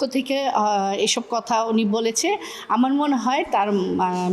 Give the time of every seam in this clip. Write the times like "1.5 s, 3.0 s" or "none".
none